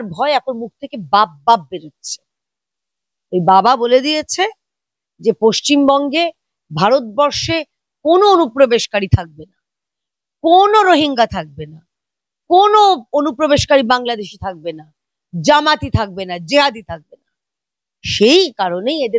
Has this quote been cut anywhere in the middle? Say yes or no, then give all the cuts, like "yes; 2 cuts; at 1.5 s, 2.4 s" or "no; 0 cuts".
no; 0 cuts